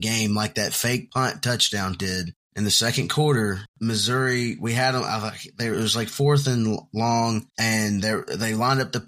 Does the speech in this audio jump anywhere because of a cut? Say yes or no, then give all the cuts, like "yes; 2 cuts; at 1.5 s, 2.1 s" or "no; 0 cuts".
yes; 4 cuts; at 1.1 s, 2.4 s, 3.7 s, 7.5 s